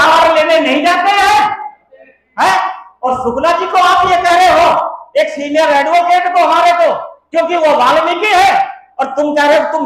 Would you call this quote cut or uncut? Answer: uncut